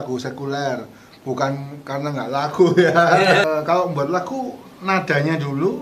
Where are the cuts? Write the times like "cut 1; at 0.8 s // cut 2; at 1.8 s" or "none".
cut 1; at 3.4 s

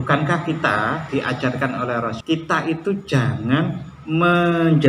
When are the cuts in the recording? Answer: cut 1; at 1.0 s // cut 2; at 2.2 s

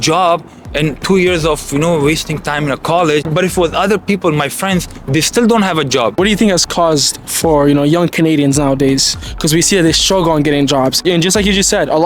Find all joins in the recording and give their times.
cut 1; at 3.3 s // cut 2; at 6.2 s // cut 3; at 11.0 s

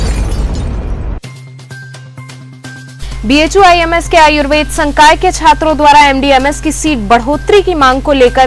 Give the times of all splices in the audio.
cut 1; at 3.0 s

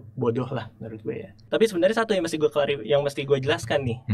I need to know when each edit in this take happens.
cut 1; at 1.5 s

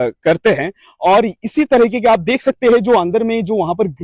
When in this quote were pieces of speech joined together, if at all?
none

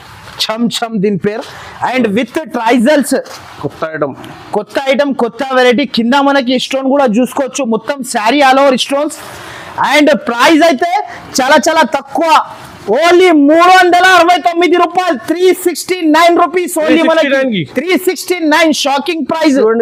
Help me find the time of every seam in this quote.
none

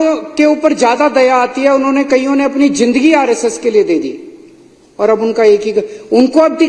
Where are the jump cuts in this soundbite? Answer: none

